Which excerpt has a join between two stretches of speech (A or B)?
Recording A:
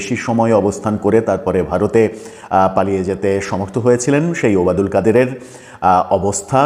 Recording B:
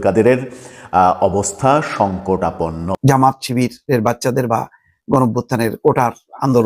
B